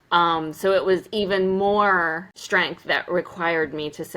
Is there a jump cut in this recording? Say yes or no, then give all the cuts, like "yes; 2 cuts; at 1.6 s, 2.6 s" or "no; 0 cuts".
yes; 1 cut; at 2.3 s